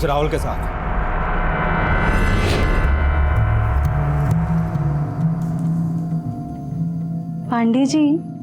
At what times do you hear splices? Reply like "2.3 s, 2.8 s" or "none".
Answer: 2.6 s